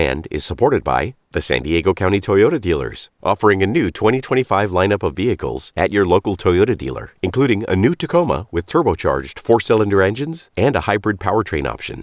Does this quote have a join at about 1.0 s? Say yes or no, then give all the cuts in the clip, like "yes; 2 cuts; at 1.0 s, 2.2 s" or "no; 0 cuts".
yes; 1 cut; at 1.0 s